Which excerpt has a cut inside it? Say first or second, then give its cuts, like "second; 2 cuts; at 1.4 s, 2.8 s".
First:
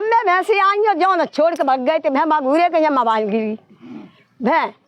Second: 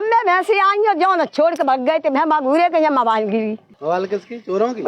second; 1 cut; at 3.7 s